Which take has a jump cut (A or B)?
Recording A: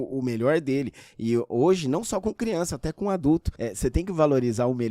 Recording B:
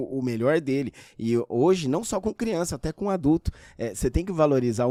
A